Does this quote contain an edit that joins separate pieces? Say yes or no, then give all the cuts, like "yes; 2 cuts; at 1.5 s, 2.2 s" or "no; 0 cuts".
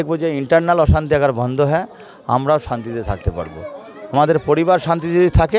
no; 0 cuts